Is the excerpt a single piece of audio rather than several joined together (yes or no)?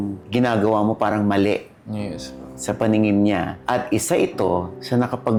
yes